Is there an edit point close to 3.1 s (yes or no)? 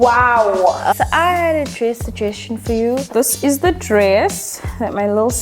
yes